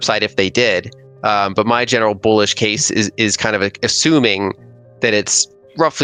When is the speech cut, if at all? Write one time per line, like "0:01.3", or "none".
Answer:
none